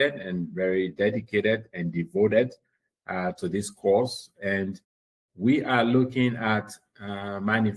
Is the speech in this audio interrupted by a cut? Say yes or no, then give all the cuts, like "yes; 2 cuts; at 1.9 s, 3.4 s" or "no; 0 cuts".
no; 0 cuts